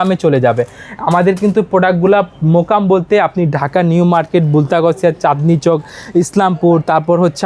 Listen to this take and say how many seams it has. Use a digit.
0